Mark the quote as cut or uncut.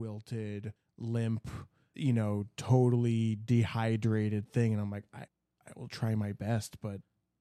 uncut